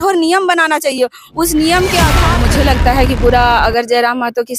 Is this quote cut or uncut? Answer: cut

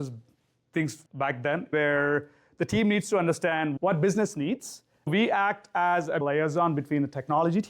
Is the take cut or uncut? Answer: cut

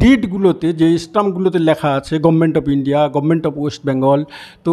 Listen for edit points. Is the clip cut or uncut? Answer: uncut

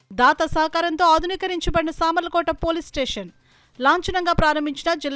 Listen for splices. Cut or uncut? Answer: uncut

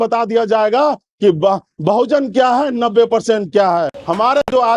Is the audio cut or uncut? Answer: uncut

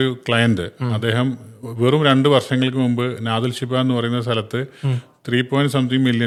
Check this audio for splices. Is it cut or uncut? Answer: uncut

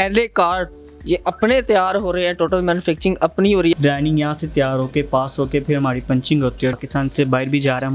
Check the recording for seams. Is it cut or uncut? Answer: cut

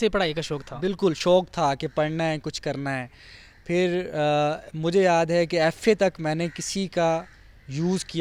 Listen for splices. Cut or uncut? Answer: uncut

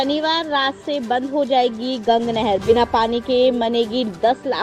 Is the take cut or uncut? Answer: uncut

